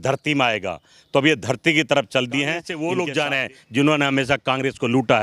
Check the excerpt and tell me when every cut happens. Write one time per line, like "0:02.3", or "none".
0:02.7